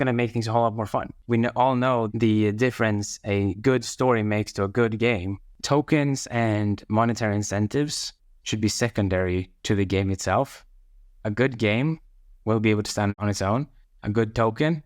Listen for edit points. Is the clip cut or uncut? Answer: cut